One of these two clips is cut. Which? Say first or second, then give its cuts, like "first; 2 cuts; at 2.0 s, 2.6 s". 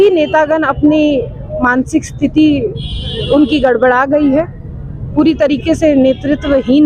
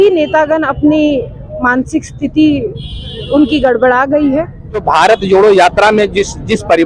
second; 1 cut; at 4.8 s